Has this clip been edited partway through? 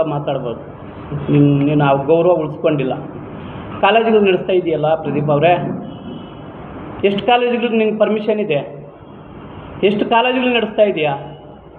no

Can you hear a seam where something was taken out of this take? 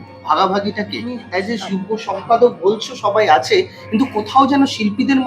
yes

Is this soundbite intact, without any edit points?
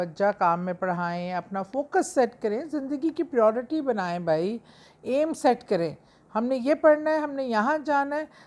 yes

